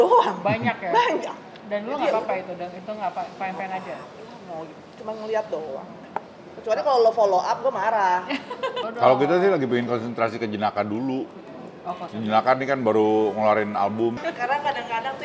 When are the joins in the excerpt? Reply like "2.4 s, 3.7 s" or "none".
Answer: 8.8 s, 14.2 s

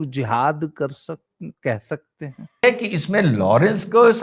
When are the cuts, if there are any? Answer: 2.6 s

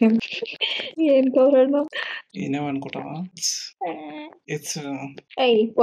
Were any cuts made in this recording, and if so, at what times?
3.7 s

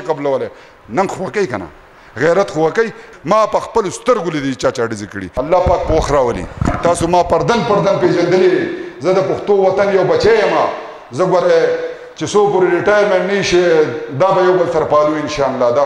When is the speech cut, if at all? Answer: 3.0 s, 5.2 s

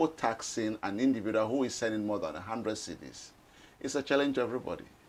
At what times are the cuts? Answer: none

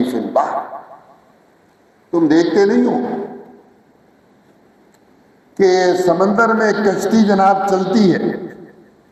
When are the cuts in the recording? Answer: none

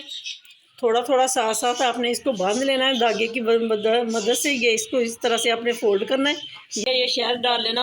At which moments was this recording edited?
6.8 s

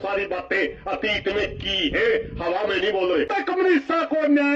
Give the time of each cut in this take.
3.4 s

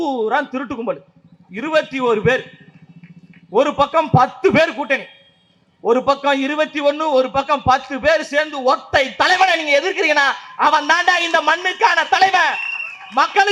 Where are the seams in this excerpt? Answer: none

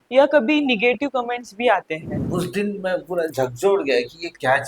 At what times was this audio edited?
2.0 s

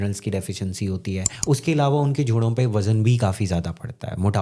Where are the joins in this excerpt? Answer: 1.3 s

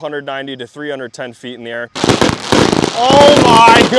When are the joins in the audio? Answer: 2.0 s

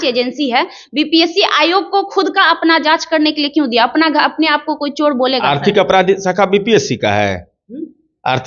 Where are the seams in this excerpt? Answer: none

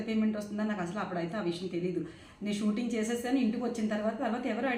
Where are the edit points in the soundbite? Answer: none

